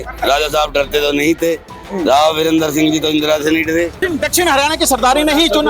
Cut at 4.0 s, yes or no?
yes